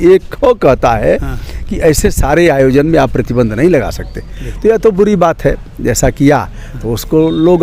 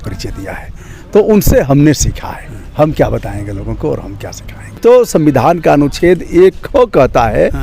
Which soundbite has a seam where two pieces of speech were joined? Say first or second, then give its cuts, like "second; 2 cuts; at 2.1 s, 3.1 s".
second; 1 cut; at 4.8 s